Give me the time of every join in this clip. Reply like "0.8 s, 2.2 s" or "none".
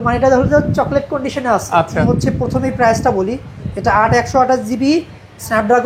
2.0 s